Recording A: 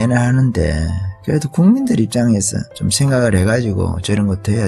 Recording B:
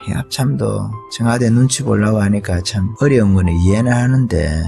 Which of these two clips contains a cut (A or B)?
B